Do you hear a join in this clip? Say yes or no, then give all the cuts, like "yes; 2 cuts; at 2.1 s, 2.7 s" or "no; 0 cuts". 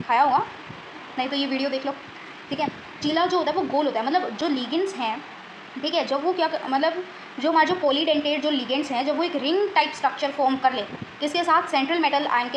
no; 0 cuts